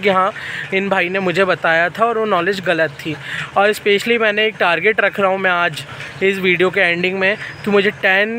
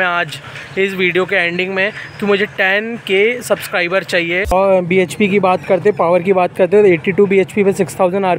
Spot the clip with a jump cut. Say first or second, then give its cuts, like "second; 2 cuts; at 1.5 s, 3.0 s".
second; 1 cut; at 4.5 s